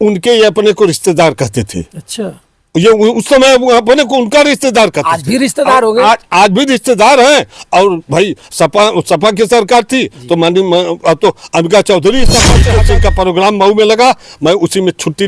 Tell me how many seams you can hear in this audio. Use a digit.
1